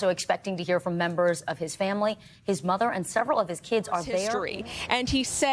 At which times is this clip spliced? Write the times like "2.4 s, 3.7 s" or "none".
4.4 s